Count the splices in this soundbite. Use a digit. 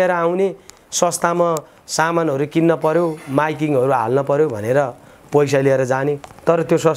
0